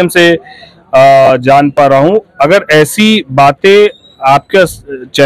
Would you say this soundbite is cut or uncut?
uncut